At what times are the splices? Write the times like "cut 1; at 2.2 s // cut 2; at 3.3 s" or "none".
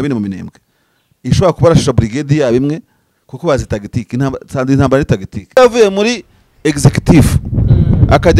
cut 1; at 5.6 s